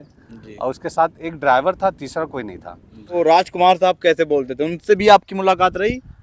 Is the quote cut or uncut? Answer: cut